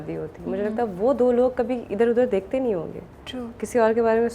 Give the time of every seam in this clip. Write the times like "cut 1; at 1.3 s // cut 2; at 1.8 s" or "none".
none

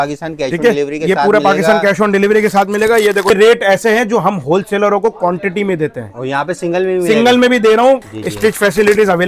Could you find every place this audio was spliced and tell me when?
cut 1; at 3.3 s // cut 2; at 8.0 s

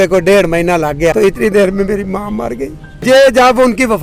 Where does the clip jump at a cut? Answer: cut 1; at 1.1 s // cut 2; at 2.9 s

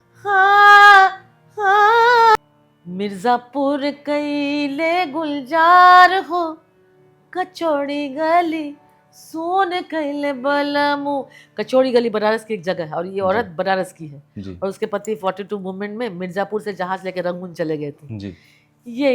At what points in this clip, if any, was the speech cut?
cut 1; at 2.4 s

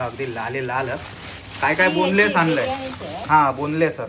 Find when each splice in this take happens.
none

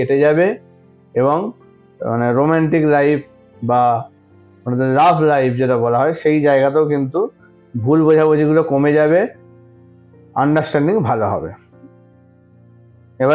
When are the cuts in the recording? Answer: none

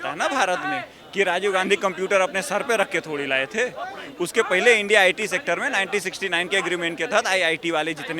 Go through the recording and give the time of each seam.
none

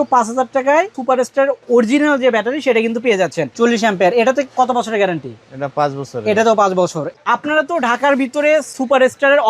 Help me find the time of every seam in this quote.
cut 1; at 1.0 s // cut 2; at 3.5 s // cut 3; at 7.1 s

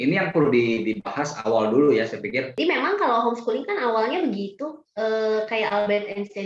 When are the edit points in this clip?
cut 1; at 2.5 s

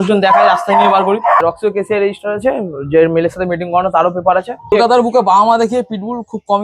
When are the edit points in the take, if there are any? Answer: cut 1; at 1.4 s // cut 2; at 4.7 s

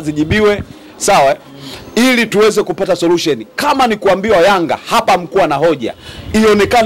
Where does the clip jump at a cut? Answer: none

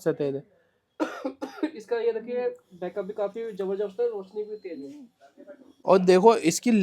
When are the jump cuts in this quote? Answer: cut 1; at 5.7 s

